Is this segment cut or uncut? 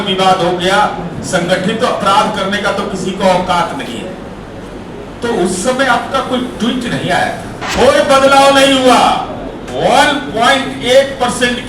cut